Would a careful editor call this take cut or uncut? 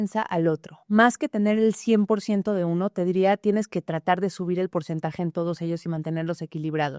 uncut